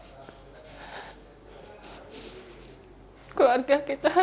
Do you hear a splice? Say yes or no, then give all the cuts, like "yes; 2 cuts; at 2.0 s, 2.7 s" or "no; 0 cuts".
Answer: no; 0 cuts